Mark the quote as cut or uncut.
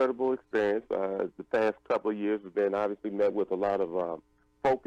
cut